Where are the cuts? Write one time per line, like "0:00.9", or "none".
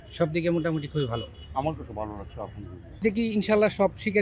0:03.0